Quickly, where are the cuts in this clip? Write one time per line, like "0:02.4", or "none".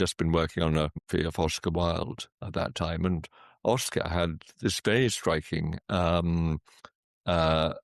0:01.1